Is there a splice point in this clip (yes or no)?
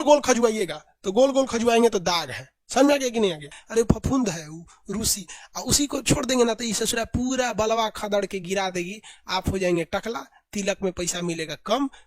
yes